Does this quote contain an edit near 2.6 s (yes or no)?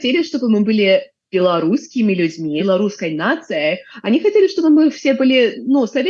yes